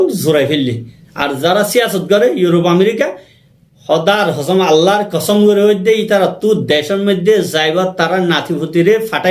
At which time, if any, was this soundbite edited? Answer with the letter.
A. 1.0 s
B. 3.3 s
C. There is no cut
A